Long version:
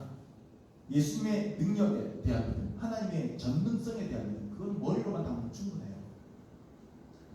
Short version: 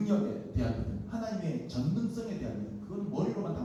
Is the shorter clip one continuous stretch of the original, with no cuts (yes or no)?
yes